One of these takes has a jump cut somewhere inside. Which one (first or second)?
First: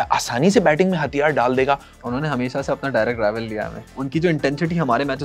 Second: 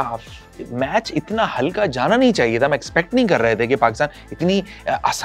first